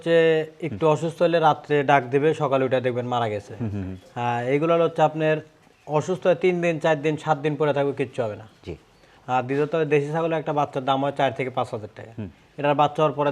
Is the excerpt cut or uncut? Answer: uncut